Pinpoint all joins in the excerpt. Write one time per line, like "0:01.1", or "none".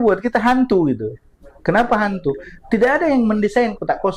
none